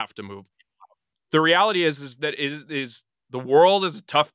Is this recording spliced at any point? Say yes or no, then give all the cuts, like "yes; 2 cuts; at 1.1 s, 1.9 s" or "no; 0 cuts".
no; 0 cuts